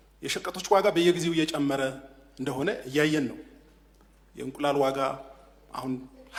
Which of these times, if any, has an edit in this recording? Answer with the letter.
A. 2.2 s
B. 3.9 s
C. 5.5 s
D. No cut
D